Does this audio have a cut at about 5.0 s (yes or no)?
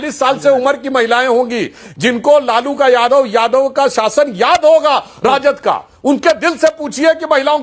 no